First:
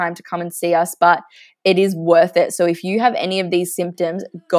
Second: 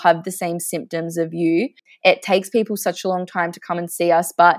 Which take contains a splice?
second; 1 cut; at 1.8 s

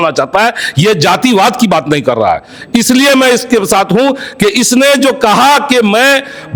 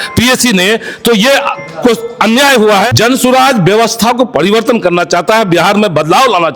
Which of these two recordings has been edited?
second; 1 cut; at 2.9 s

